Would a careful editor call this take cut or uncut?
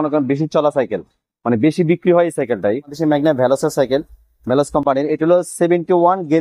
cut